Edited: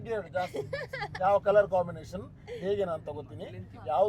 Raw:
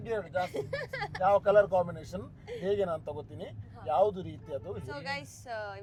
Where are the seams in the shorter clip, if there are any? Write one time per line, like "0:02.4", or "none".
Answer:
none